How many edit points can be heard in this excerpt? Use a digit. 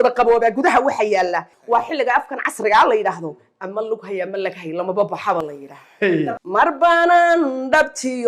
2